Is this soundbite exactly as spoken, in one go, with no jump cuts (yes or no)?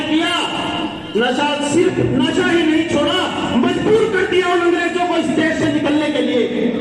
yes